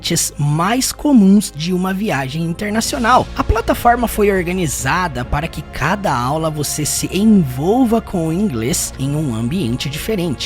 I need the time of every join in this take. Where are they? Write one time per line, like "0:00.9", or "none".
0:03.3

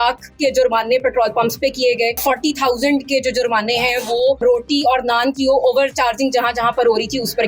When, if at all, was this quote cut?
0:02.2
0:04.4

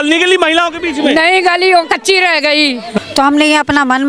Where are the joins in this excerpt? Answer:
0:02.9

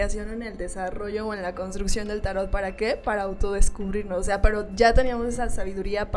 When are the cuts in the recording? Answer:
none

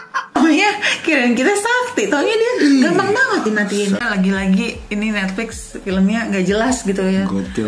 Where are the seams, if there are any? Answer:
0:04.1

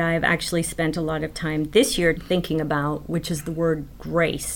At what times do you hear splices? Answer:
0:02.2

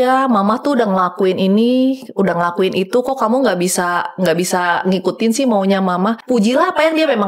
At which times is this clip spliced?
0:06.2

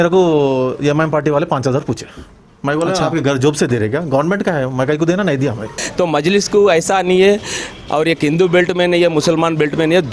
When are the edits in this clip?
0:05.8

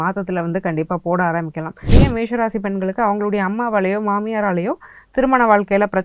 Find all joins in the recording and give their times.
0:01.9

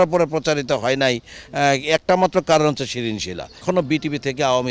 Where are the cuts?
0:03.6

